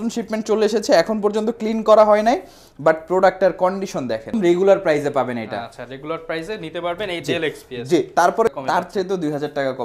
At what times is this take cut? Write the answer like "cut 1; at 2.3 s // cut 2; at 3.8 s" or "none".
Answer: cut 1; at 4.3 s // cut 2; at 8.5 s